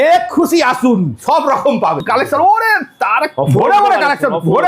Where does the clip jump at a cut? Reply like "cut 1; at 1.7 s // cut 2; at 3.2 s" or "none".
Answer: cut 1; at 2.0 s